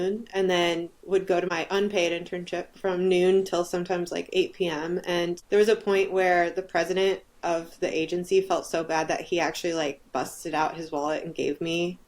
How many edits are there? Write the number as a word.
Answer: two